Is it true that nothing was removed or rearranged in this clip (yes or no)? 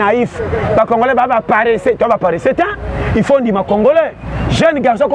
yes